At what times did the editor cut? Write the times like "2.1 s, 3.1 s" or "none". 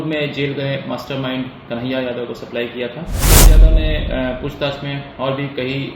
3.5 s